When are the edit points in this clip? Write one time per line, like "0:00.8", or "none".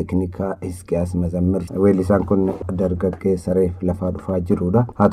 0:01.6